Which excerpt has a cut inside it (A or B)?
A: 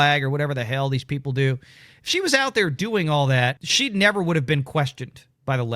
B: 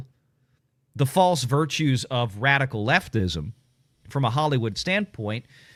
A